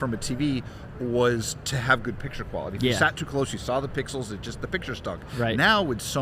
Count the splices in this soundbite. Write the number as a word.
zero